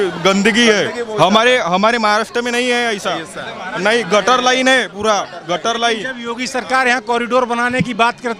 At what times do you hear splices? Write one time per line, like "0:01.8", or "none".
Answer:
none